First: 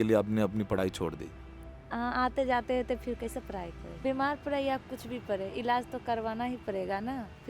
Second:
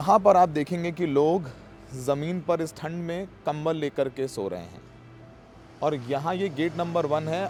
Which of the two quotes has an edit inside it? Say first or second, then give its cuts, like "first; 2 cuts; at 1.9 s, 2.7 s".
first; 1 cut; at 3.9 s